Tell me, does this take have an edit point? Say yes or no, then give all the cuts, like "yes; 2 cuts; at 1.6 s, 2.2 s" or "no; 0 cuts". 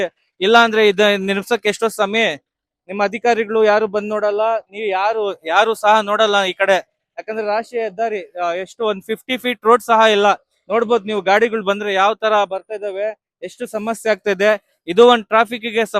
no; 0 cuts